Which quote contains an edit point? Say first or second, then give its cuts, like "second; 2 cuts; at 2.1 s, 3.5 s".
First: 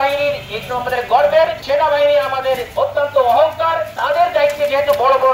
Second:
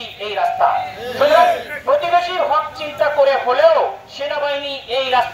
first; 3 cuts; at 1.6 s, 2.7 s, 3.9 s